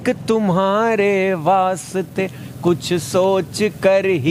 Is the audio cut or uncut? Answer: uncut